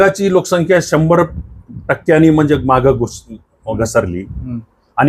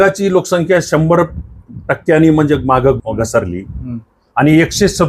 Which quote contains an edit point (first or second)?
second